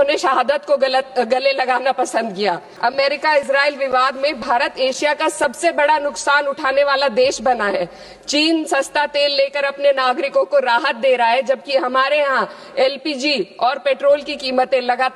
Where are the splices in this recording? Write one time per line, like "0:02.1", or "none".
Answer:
0:02.7